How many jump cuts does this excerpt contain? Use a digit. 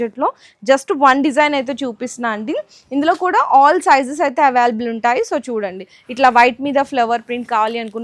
0